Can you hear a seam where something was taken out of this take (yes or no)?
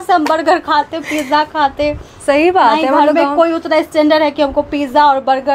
no